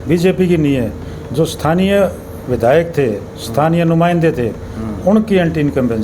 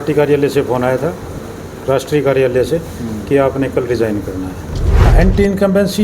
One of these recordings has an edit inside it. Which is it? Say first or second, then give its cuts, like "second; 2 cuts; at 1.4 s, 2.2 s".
second; 1 cut; at 5.1 s